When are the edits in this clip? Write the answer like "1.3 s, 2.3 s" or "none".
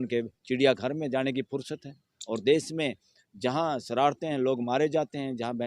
none